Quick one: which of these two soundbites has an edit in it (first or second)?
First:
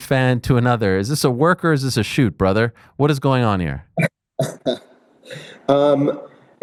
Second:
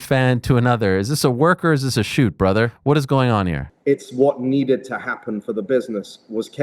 second